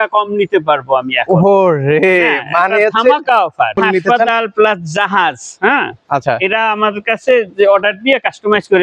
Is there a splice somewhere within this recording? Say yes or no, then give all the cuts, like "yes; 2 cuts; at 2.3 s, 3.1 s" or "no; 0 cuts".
yes; 1 cut; at 3.8 s